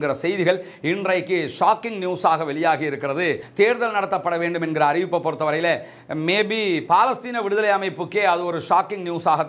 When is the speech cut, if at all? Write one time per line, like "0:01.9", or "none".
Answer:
0:03.4